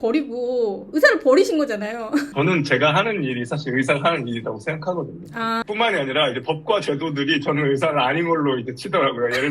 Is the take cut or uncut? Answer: cut